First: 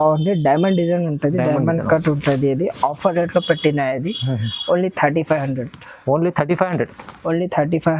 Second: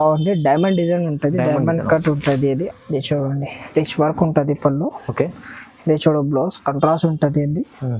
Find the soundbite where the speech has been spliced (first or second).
second